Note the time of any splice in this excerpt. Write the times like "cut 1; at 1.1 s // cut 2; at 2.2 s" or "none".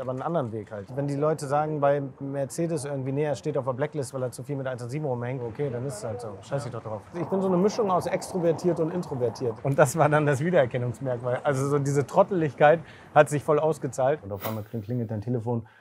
cut 1; at 0.9 s // cut 2; at 5.4 s // cut 3; at 7.2 s // cut 4; at 9.6 s // cut 5; at 14.3 s